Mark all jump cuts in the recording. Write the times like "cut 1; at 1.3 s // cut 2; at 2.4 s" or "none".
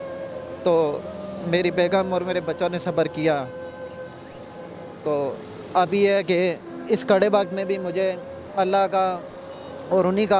none